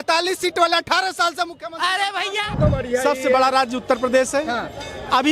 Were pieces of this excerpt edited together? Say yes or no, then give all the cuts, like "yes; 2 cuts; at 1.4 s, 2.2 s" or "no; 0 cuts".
yes; 1 cut; at 2.6 s